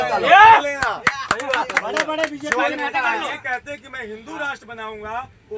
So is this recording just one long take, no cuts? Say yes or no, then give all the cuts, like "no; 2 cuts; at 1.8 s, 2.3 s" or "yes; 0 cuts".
yes; 0 cuts